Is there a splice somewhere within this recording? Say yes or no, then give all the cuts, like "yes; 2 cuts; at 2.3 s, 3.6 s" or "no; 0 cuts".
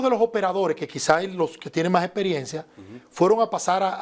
no; 0 cuts